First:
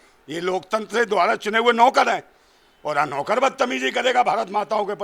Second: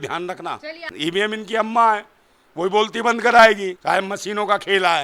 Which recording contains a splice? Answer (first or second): second